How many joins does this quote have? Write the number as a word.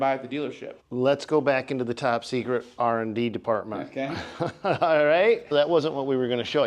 one